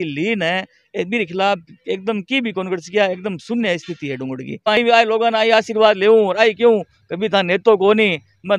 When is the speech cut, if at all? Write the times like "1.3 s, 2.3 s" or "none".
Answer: 4.8 s